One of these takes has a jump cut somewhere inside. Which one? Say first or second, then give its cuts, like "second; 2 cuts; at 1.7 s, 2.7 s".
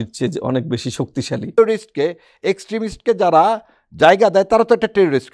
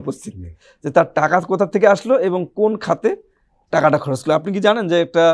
first; 1 cut; at 1.6 s